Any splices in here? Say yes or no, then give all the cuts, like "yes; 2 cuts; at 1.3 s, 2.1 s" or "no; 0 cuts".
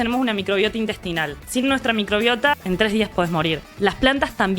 yes; 3 cuts; at 1.3 s, 2.5 s, 3.7 s